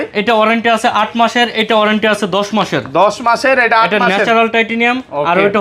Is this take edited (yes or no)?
no